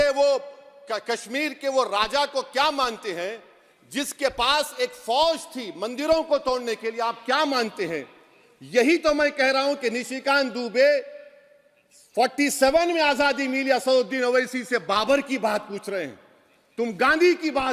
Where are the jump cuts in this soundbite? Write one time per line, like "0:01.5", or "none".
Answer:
none